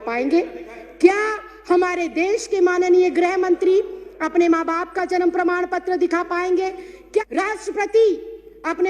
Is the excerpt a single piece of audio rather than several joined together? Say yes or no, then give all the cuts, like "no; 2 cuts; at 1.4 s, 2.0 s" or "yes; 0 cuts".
no; 1 cut; at 7.3 s